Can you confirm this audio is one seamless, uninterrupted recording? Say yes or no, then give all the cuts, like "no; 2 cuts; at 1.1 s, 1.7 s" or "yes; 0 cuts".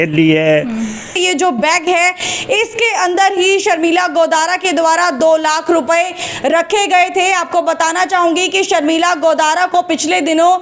no; 1 cut; at 1.2 s